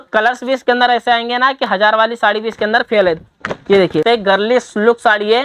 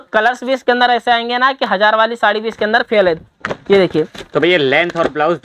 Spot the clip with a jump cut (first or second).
first